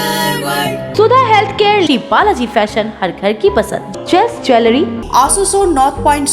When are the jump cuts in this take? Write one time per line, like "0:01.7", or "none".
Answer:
0:00.9
0:05.0